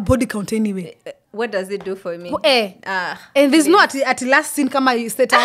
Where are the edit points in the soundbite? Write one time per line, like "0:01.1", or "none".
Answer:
none